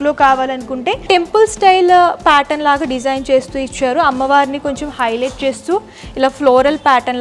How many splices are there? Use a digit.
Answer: 0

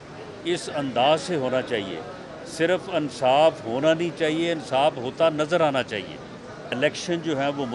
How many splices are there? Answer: 1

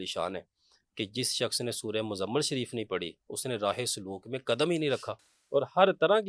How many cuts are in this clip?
1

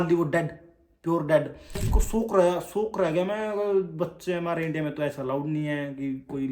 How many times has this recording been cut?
1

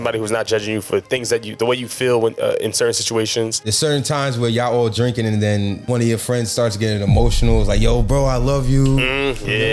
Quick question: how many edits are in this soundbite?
2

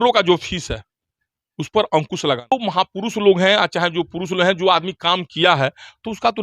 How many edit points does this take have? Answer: 1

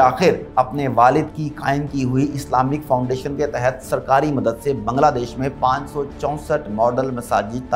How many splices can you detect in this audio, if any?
0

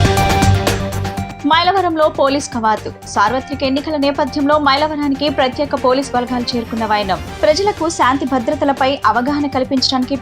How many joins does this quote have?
1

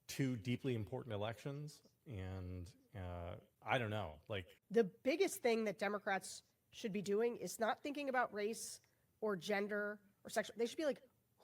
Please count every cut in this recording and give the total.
2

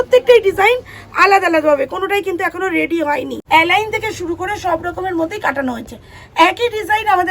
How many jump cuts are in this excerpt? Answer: 1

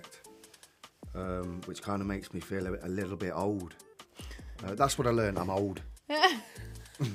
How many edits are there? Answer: 0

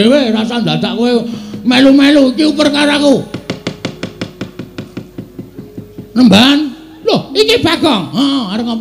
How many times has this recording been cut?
0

